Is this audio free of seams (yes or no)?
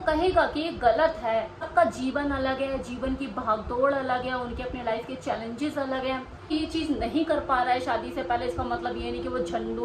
no